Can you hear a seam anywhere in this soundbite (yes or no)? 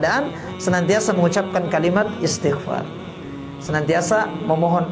no